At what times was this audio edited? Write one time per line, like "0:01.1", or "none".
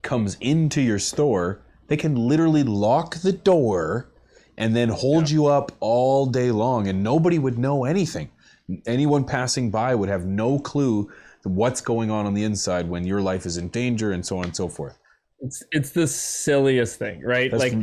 none